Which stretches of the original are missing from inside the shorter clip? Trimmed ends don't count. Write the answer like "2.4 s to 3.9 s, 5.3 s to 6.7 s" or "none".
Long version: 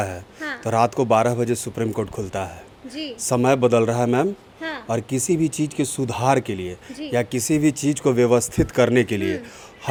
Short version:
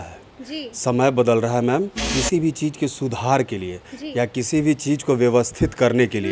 4.5 s to 5.1 s